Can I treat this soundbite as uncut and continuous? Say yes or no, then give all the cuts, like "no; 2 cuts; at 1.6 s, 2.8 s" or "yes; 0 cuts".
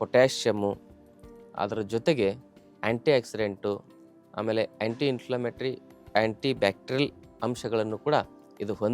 yes; 0 cuts